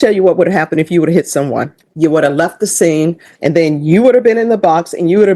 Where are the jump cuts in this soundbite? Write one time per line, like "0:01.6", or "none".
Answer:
0:01.8
0:03.3